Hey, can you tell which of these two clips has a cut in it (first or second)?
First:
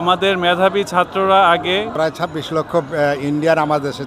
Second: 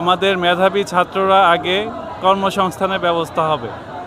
first